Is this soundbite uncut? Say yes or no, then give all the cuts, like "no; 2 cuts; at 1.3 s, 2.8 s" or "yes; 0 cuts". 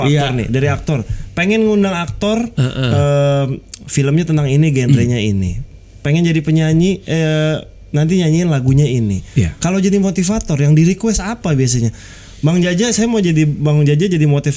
yes; 0 cuts